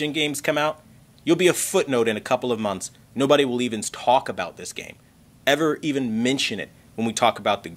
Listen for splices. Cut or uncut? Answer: uncut